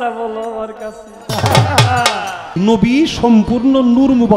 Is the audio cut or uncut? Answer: cut